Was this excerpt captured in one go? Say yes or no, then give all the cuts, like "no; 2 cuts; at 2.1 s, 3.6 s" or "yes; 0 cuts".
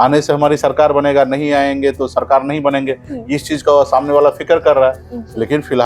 yes; 0 cuts